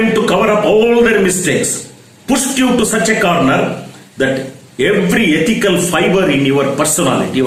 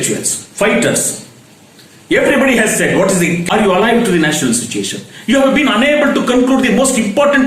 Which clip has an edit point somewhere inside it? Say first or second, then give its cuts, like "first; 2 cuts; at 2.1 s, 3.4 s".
second; 1 cut; at 3.4 s